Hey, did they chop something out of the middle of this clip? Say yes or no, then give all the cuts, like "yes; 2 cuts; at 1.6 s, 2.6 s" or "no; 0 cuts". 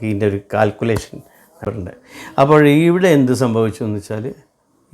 yes; 1 cut; at 1.6 s